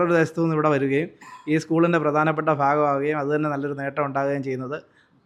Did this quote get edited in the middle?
no; 0 cuts

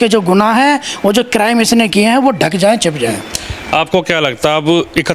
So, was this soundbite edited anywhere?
no; 0 cuts

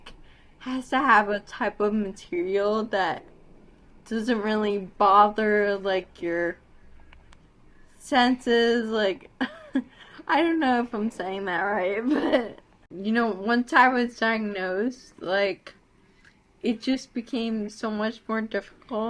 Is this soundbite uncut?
no; 1 cut; at 12.9 s

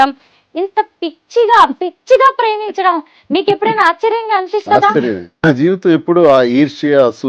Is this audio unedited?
no; 1 cut; at 5.5 s

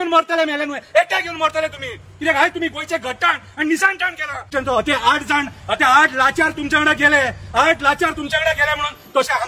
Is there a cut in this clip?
yes; 1 cut; at 4.4 s

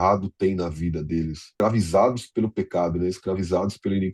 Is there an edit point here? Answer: yes; 1 cut; at 1.4 s

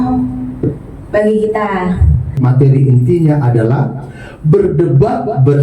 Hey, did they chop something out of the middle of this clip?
yes; 1 cut; at 2.4 s

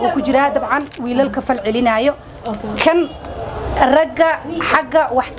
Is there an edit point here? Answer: no; 0 cuts

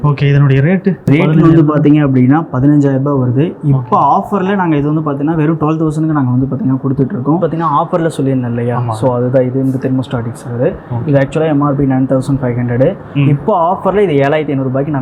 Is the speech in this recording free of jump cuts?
no; 2 cuts; at 1.1 s, 7.4 s

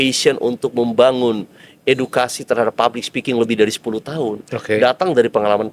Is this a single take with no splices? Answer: yes; 0 cuts

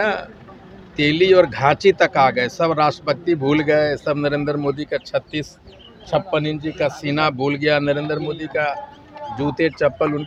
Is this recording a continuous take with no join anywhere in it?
yes; 0 cuts

